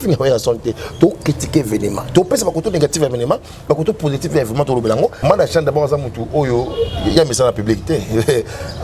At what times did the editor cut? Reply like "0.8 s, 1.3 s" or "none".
5.2 s